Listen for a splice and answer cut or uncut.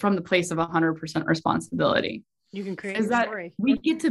uncut